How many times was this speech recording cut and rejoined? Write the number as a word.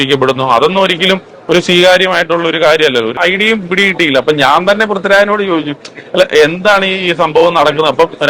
one